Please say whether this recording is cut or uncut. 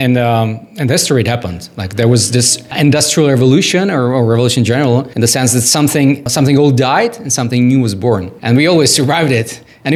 uncut